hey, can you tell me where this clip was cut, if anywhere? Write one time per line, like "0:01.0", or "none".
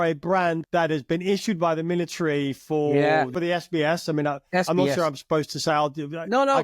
none

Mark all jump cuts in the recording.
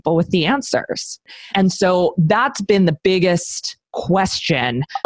0:01.3

